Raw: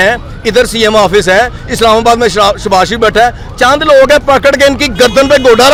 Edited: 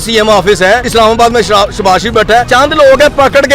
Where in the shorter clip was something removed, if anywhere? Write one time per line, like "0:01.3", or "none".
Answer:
0:00.9
0:02.5